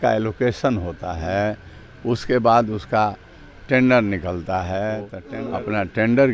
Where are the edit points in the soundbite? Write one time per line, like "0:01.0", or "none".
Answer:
0:05.2